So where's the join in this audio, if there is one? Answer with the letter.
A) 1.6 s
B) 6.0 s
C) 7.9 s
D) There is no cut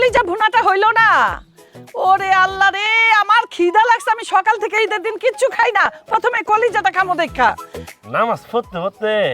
C